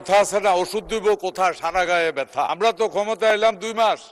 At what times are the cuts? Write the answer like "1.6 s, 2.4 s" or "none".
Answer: 2.5 s